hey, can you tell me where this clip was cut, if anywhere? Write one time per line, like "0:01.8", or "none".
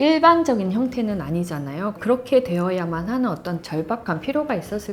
none

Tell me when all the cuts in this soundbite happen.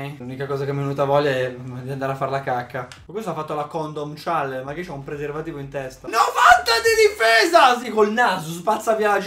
0:03.0
0:06.1

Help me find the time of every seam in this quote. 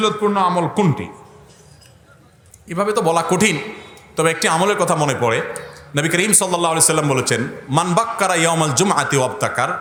none

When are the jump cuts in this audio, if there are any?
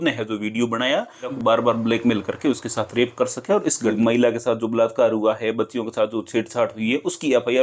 0:01.3
0:03.9

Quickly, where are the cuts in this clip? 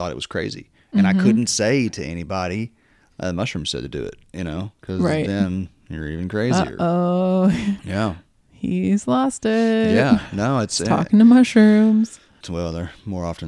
0:12.4

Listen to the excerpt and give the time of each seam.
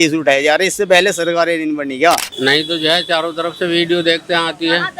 0:02.3

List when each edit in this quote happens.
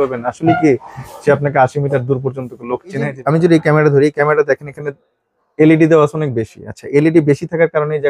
0:03.1

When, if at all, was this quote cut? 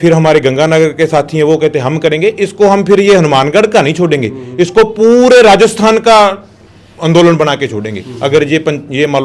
none

